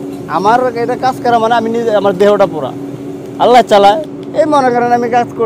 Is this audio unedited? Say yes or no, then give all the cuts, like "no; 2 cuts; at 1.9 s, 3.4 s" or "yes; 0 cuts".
no; 1 cut; at 2.8 s